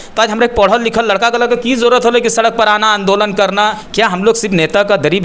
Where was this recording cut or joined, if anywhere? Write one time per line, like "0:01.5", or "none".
0:03.8